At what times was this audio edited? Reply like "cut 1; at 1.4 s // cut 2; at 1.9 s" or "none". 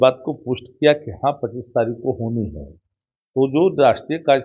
none